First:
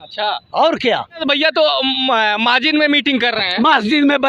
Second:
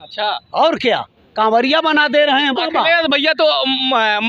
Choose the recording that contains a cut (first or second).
first